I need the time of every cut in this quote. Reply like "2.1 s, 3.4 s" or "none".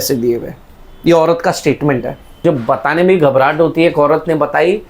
2.4 s